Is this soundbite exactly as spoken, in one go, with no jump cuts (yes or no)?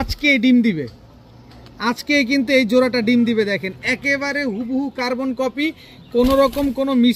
yes